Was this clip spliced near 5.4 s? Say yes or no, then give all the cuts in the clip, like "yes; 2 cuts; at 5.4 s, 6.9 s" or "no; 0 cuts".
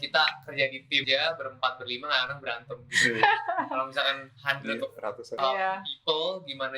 yes; 2 cuts; at 1.0 s, 5.4 s